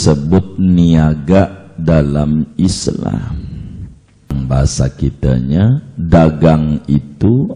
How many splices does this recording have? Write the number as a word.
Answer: one